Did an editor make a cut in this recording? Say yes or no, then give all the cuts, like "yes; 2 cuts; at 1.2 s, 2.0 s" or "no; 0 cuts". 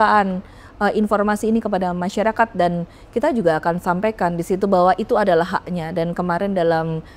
no; 0 cuts